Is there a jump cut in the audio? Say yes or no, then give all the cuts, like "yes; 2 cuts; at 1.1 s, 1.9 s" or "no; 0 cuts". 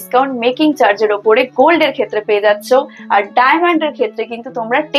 no; 0 cuts